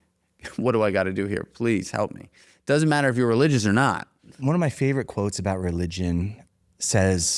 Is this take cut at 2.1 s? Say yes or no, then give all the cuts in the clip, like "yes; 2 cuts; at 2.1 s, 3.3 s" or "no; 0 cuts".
no; 2 cuts; at 4.3 s, 6.4 s